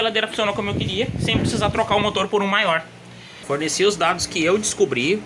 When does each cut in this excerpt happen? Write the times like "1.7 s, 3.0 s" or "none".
3.4 s